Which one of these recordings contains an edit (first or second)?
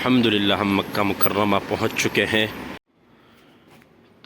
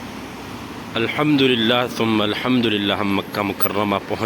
first